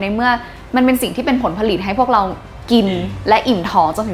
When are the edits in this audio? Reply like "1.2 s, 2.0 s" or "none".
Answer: none

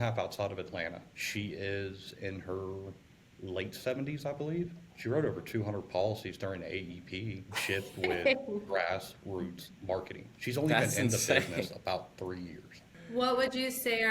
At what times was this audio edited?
1.1 s, 4.9 s, 7.5 s, 10.2 s, 12.9 s

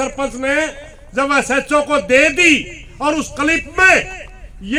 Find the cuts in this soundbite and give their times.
none

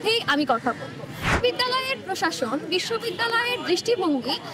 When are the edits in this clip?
1.4 s

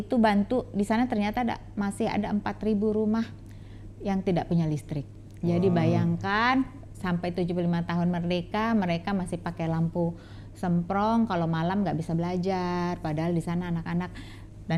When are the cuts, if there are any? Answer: none

